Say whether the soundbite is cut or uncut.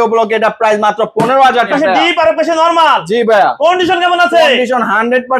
cut